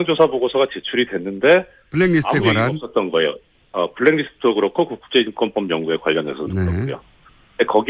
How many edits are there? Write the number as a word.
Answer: zero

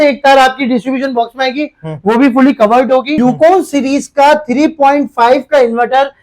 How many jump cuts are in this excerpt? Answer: one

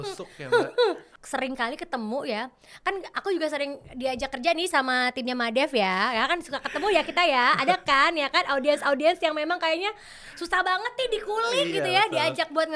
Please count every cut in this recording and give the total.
one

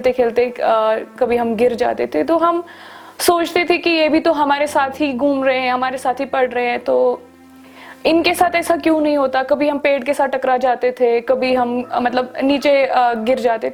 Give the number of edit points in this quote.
zero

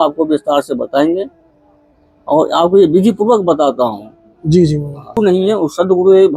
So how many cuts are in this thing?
one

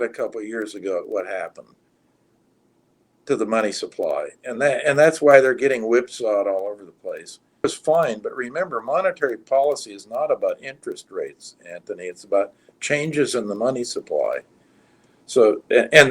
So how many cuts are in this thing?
one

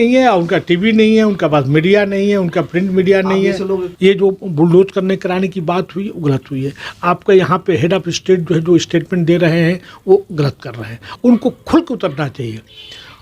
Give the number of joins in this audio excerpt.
two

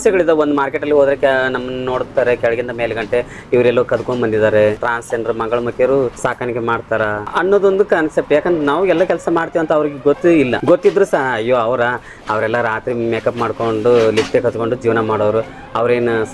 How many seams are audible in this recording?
four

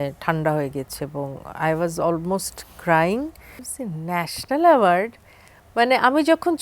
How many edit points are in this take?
one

